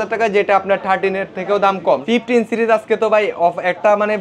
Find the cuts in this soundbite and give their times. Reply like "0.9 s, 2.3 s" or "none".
2.0 s